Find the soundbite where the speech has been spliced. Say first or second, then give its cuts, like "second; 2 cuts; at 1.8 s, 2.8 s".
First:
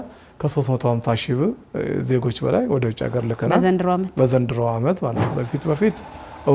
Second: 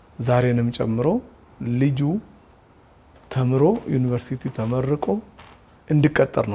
first; 1 cut; at 5.3 s